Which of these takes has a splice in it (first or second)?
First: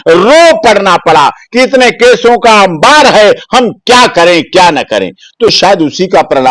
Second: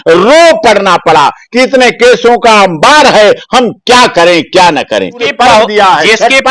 second